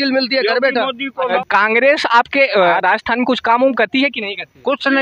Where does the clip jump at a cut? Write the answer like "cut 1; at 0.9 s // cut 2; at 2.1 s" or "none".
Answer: cut 1; at 1.4 s // cut 2; at 2.7 s